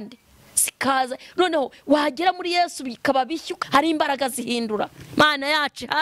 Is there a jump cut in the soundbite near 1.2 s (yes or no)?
no